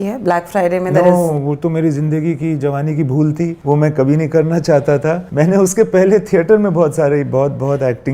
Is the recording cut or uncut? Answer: cut